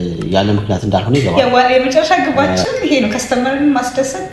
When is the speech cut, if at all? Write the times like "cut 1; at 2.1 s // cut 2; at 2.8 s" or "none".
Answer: cut 1; at 1.3 s